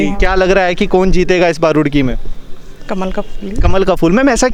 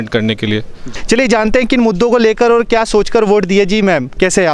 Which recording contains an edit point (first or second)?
second